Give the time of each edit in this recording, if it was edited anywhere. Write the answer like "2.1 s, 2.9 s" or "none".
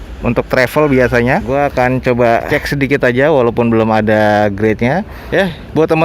1.5 s, 5.2 s